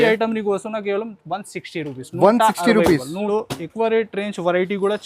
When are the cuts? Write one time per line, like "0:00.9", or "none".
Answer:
0:03.3